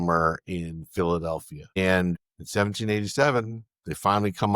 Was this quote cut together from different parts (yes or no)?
yes